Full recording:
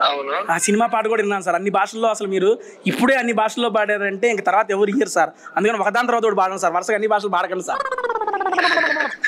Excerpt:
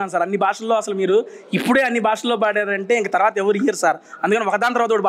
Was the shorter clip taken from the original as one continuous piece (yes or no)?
yes